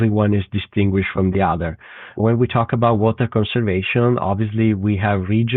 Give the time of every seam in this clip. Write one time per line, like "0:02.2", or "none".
0:02.2